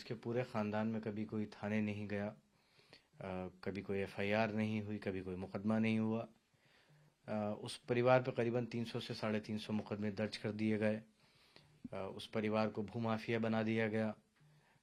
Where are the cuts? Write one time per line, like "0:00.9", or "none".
none